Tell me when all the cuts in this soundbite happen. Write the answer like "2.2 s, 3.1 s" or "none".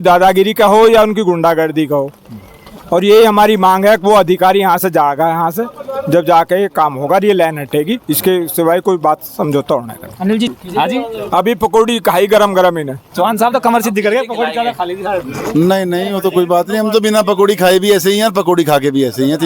10.5 s